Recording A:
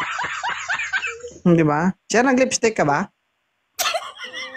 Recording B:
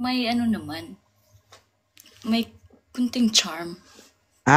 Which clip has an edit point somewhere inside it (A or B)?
A